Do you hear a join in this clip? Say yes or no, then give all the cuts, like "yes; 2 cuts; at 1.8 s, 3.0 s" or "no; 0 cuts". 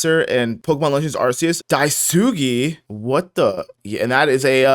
no; 0 cuts